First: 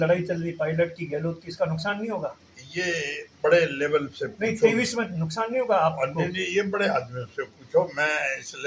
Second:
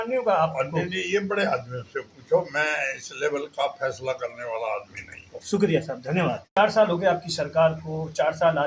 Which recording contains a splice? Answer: second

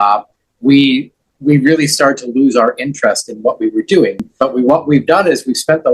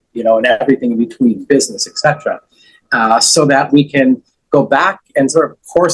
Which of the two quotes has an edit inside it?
first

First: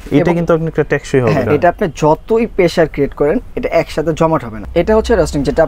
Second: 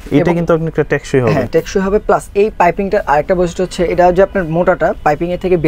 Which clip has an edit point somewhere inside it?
first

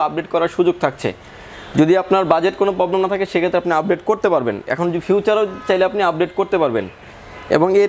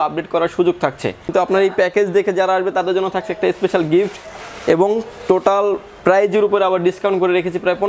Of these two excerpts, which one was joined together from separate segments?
second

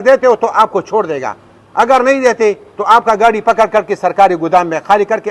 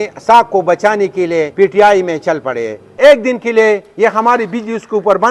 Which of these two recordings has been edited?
second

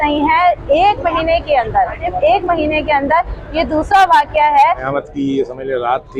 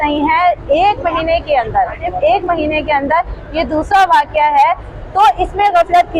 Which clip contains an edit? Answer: first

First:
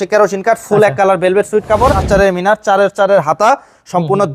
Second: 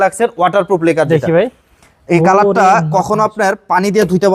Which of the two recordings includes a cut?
first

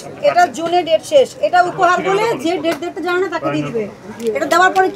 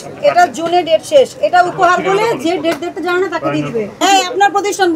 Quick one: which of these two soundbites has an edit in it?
second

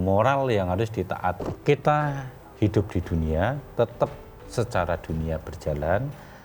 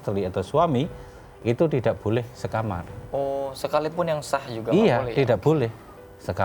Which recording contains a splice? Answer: first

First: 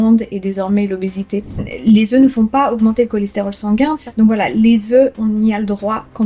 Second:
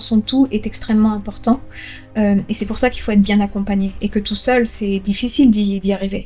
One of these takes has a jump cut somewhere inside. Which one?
first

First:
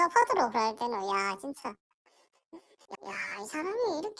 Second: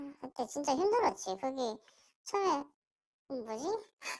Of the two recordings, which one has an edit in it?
first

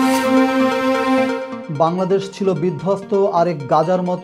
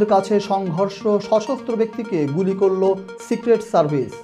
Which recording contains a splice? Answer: first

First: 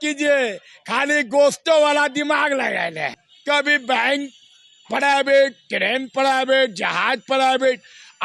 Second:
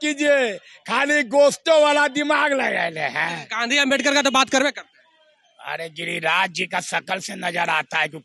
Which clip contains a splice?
first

